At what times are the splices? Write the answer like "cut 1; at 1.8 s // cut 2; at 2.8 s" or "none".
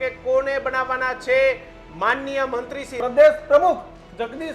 cut 1; at 2.8 s